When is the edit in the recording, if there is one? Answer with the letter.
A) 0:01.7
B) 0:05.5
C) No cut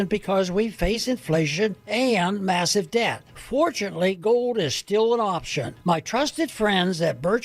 C